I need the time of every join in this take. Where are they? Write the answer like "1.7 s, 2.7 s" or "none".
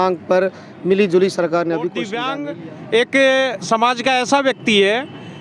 2.2 s